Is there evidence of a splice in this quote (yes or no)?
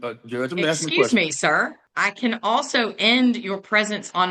yes